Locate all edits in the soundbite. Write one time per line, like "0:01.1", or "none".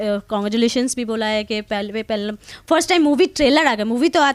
none